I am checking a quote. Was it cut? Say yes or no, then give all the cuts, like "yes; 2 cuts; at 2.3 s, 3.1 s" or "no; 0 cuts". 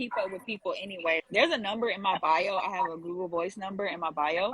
yes; 1 cut; at 1.2 s